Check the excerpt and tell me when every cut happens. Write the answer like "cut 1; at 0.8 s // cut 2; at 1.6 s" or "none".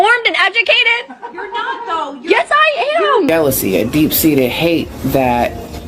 cut 1; at 3.3 s